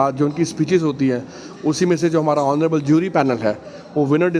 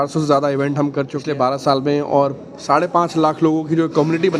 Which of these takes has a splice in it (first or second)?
second